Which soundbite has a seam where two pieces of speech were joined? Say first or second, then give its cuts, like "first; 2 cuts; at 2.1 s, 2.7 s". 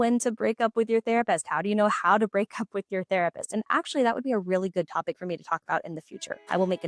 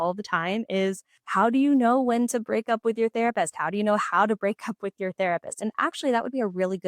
second; 1 cut; at 1.1 s